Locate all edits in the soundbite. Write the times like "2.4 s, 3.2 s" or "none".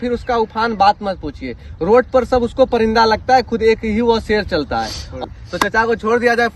none